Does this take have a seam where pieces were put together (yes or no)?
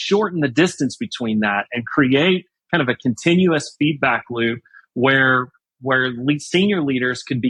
no